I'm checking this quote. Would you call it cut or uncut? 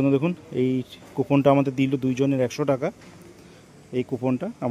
uncut